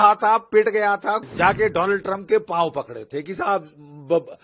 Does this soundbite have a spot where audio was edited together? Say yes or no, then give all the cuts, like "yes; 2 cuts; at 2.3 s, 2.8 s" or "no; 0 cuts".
yes; 1 cut; at 1.2 s